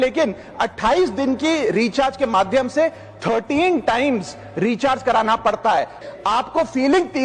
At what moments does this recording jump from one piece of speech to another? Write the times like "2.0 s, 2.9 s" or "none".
6.0 s